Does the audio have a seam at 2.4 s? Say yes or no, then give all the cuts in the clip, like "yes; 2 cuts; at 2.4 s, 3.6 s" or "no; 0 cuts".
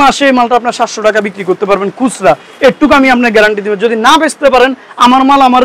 no; 0 cuts